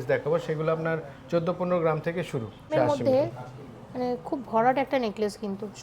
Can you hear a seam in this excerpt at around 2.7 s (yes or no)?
yes